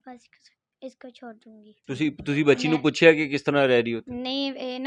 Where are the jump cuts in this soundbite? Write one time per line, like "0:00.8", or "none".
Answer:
0:01.7

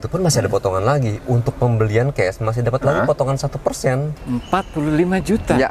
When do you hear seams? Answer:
0:04.2

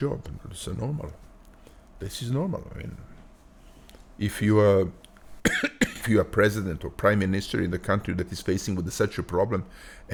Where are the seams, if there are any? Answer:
none

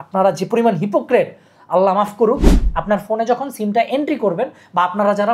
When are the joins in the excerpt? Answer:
0:02.5

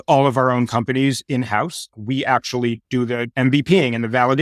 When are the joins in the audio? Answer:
none

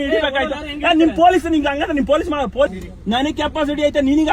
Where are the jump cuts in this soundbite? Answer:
0:02.7

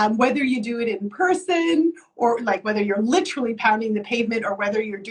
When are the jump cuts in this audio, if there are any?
none

